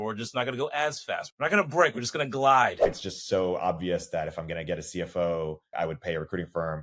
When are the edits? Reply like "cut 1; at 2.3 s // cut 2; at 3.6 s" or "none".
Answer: cut 1; at 1.3 s // cut 2; at 3.0 s // cut 3; at 5.7 s